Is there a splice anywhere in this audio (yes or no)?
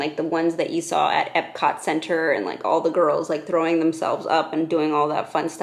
no